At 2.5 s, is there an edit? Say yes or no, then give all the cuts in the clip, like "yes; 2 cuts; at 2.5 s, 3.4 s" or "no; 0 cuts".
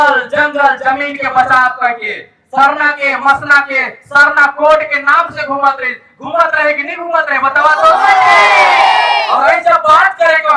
no; 0 cuts